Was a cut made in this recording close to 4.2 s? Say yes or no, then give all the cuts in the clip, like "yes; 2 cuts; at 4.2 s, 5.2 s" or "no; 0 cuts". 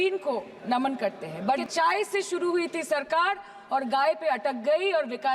no; 1 cut; at 1.6 s